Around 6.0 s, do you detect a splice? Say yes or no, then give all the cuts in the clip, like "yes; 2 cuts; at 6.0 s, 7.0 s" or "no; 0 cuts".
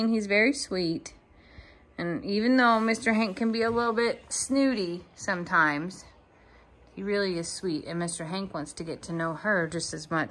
no; 0 cuts